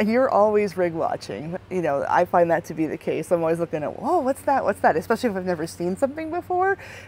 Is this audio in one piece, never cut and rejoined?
yes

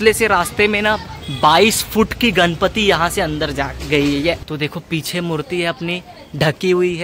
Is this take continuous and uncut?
no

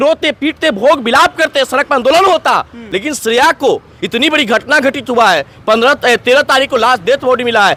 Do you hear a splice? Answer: no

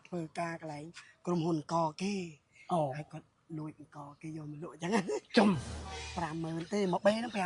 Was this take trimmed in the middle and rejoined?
yes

